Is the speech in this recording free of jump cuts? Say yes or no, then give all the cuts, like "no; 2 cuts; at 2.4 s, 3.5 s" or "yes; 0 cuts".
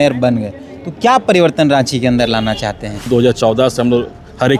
no; 1 cut; at 3.1 s